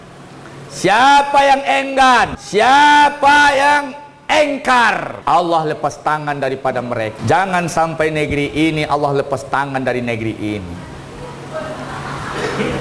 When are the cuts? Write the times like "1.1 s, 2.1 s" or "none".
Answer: 2.4 s, 5.1 s, 7.2 s